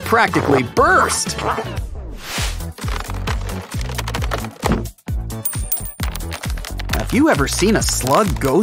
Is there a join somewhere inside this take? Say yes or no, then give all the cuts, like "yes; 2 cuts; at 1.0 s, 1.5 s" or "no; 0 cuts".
yes; 1 cut; at 2.2 s